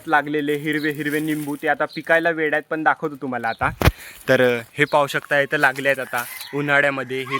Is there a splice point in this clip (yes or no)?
no